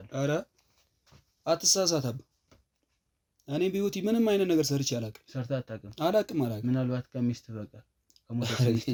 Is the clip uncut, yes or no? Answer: yes